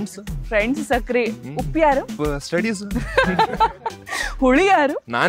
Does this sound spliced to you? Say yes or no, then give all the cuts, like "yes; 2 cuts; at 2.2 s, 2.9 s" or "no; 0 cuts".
no; 0 cuts